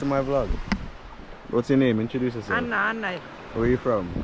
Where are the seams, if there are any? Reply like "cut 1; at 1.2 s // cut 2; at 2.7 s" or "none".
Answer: none